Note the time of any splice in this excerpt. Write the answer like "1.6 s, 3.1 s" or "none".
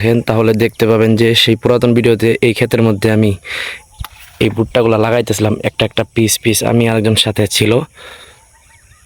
none